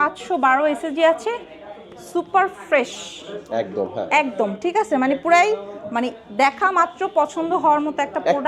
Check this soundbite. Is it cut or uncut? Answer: uncut